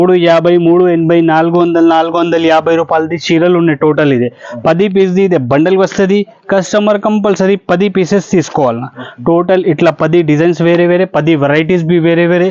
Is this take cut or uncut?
uncut